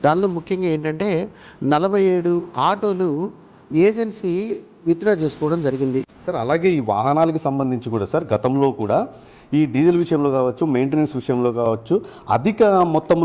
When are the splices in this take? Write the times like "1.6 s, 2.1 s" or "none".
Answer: 6.1 s